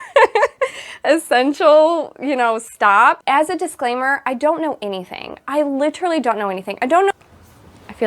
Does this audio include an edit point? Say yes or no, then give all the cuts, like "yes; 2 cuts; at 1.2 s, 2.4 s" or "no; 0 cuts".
yes; 2 cuts; at 3.2 s, 7.1 s